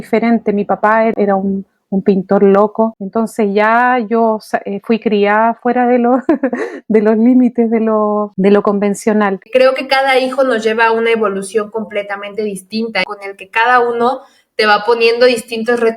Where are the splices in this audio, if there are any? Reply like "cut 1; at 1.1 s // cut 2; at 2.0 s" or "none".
cut 1; at 1.1 s // cut 2; at 9.4 s // cut 3; at 13.0 s